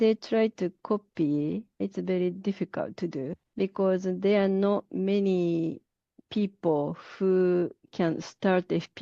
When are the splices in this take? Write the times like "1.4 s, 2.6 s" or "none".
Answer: 1.8 s, 3.4 s